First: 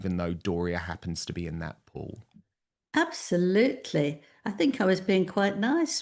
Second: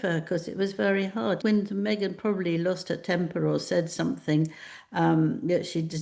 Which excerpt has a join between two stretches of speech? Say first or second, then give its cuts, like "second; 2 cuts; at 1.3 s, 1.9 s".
second; 1 cut; at 1.4 s